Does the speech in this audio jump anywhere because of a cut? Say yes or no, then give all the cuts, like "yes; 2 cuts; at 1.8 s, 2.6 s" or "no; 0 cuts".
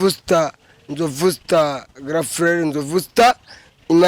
no; 0 cuts